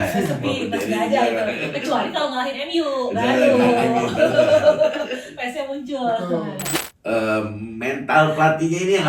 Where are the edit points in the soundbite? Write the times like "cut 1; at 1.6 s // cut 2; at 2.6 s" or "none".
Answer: cut 1; at 6.7 s